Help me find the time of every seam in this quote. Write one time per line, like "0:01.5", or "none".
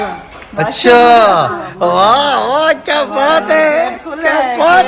none